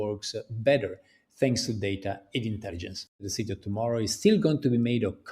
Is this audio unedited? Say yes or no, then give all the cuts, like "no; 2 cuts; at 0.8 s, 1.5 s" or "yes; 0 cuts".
no; 1 cut; at 3.2 s